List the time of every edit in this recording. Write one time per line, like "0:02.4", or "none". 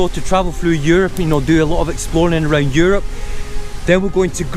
none